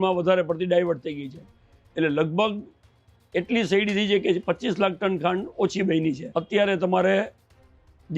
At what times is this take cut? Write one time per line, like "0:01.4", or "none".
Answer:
0:06.3